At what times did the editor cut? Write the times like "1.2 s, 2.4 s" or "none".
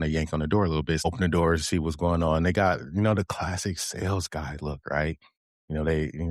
1.0 s